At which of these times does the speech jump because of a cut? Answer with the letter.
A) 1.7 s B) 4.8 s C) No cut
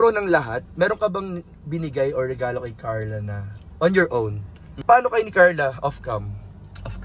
B